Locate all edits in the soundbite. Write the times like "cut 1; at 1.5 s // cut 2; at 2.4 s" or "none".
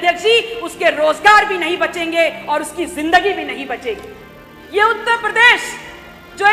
none